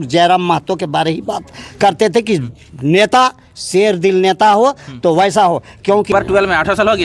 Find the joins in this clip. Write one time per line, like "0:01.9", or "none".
0:06.1